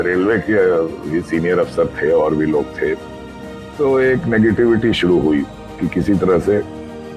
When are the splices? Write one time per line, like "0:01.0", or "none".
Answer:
none